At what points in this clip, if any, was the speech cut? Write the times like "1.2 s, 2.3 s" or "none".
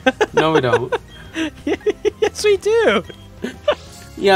none